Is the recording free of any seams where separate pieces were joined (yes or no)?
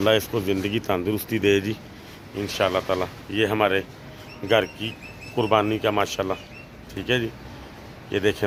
yes